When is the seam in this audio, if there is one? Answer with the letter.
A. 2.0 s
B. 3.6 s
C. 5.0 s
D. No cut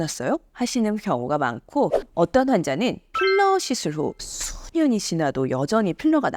A